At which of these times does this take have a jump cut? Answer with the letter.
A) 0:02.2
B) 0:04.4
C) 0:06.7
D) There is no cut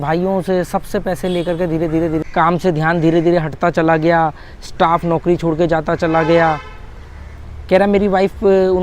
A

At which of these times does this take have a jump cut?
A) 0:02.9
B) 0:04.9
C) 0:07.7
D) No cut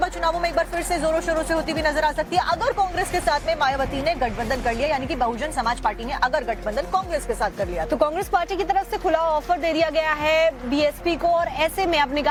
D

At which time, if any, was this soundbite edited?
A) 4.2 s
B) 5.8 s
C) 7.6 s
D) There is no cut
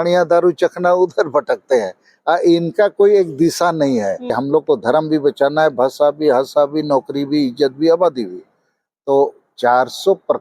A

